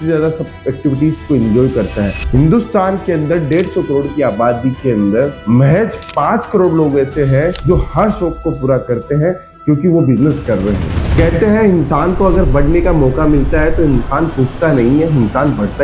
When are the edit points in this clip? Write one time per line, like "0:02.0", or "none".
0:10.9